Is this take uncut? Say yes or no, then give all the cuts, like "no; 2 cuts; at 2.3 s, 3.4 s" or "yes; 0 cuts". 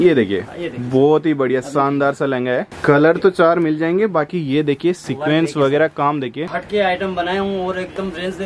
no; 2 cuts; at 2.7 s, 6.5 s